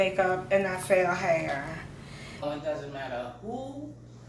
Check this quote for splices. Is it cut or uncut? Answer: cut